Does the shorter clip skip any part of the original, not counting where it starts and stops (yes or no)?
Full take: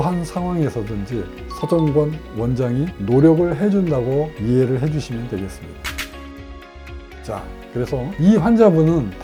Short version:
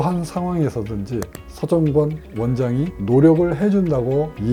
no